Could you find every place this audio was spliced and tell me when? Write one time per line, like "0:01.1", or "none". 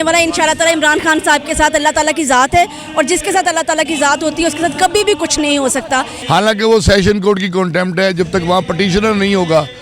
0:06.1